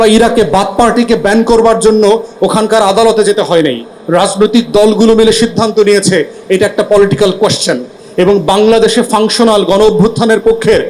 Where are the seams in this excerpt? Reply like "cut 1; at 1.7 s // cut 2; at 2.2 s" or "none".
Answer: none